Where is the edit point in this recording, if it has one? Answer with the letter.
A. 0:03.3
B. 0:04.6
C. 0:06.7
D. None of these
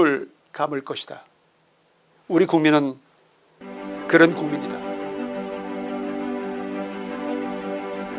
B